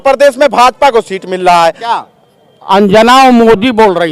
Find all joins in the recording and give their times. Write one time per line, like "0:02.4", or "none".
0:01.9